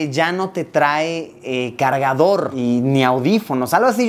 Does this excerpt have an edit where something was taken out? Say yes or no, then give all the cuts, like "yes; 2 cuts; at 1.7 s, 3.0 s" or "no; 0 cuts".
no; 0 cuts